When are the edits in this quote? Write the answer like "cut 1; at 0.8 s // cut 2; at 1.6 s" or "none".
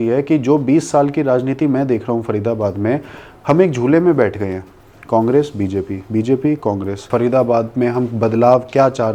cut 1; at 7.0 s